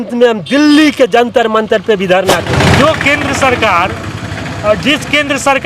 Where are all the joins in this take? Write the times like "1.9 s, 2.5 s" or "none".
2.5 s